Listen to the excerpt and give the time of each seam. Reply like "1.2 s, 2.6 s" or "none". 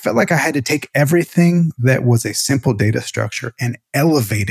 none